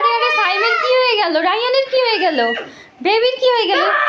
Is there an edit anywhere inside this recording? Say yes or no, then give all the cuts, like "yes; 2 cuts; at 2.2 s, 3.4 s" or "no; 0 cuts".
no; 0 cuts